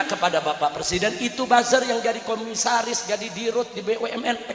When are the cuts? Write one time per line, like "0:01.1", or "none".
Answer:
none